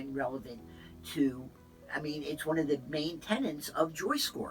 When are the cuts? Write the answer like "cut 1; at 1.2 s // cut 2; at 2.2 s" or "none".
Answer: none